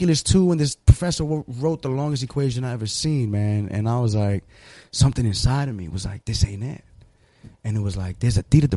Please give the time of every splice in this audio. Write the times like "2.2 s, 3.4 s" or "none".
none